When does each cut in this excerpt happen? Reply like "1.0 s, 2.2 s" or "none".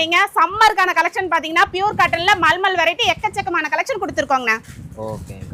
none